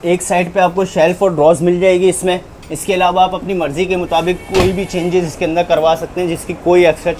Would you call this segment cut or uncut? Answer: uncut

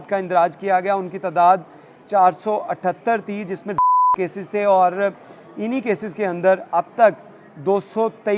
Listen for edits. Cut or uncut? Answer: uncut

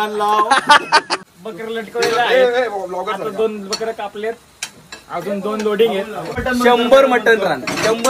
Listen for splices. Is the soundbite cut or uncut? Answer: cut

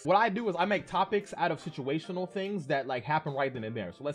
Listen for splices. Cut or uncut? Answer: uncut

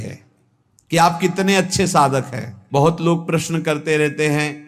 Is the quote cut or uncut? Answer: cut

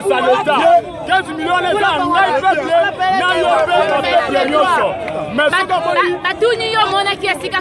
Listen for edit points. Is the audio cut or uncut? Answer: uncut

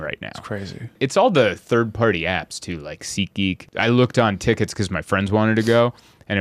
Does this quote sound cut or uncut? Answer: cut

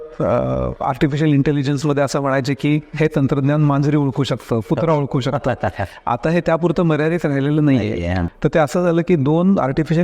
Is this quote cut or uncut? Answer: cut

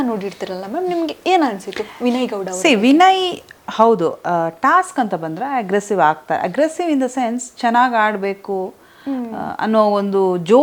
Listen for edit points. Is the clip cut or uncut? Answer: uncut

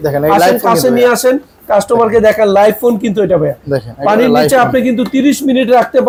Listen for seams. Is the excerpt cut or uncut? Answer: uncut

